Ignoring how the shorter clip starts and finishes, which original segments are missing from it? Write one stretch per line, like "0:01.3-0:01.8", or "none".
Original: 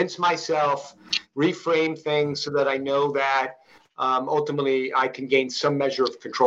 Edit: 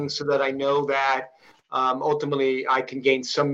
none